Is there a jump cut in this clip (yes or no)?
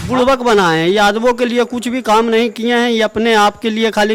no